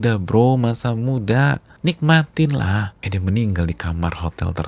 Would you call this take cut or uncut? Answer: cut